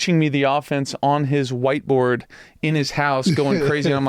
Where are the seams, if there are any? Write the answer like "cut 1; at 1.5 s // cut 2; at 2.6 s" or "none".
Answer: none